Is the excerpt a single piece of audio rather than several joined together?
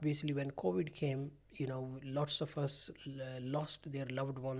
yes; 0 cuts

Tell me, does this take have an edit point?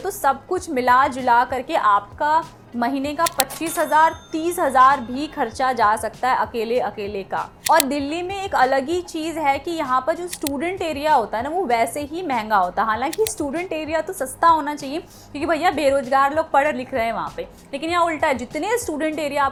no; 0 cuts

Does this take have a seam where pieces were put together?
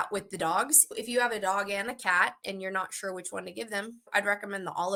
no; 0 cuts

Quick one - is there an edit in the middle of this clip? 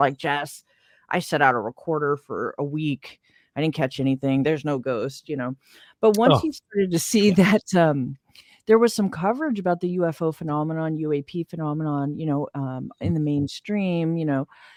no; 0 cuts

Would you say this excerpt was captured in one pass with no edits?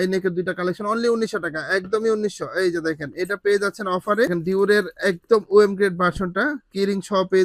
yes; 0 cuts

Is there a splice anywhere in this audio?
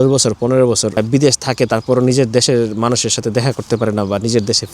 yes; 1 cut; at 1.0 s

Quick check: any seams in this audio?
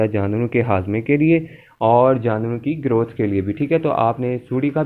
no; 0 cuts

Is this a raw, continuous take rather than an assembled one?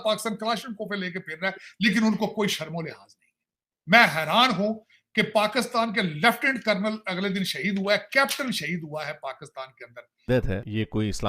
no; 1 cut; at 10.2 s

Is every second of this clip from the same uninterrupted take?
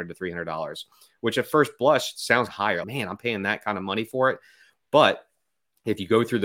no; 1 cut; at 2.6 s

